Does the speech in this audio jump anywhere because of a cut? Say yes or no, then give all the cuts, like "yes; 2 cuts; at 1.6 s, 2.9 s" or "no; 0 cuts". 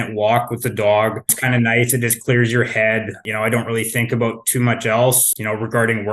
yes; 3 cuts; at 1.4 s, 3.2 s, 5.2 s